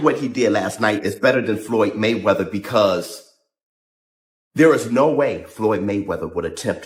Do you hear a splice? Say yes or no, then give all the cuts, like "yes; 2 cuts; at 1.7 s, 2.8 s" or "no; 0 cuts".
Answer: no; 0 cuts